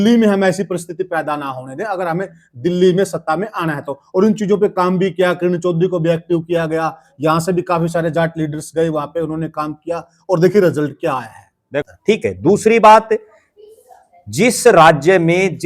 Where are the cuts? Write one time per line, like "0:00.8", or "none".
0:11.8